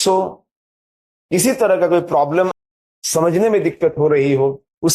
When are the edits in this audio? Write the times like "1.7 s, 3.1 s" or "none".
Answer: 2.7 s